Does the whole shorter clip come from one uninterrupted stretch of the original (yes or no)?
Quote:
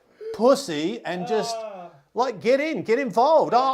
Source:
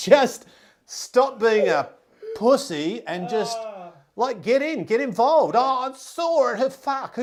yes